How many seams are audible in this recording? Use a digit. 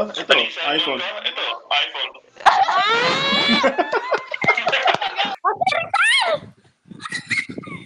1